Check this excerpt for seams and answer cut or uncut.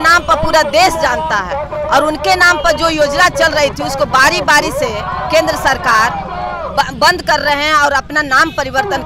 uncut